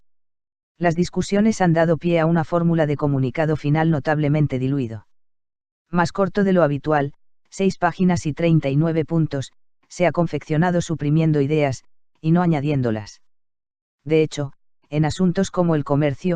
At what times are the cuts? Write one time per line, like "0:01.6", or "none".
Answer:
0:11.5